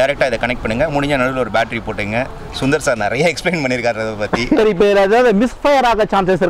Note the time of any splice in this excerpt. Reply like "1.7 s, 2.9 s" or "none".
4.6 s